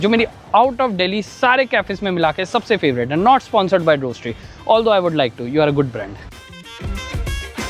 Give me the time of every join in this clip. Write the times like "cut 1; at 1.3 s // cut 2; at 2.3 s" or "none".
none